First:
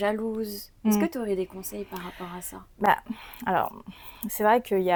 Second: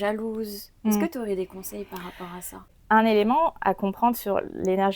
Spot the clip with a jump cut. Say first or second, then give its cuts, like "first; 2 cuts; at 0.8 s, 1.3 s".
second; 1 cut; at 2.7 s